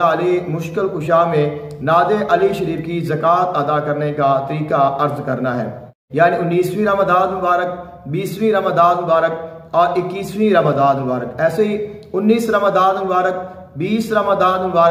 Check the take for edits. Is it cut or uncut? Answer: cut